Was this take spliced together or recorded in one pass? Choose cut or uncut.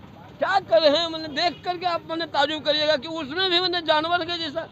uncut